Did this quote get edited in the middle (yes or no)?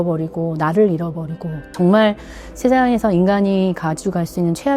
yes